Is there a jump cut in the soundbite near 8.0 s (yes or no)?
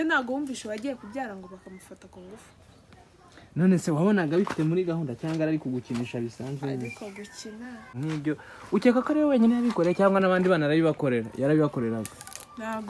yes